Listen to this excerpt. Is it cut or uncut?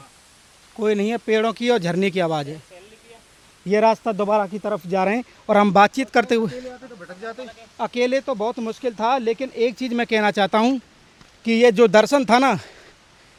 uncut